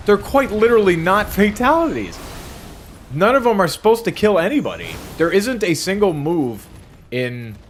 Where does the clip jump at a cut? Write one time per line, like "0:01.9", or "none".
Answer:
none